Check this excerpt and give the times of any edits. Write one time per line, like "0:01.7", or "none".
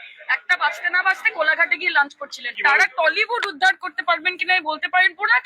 0:02.5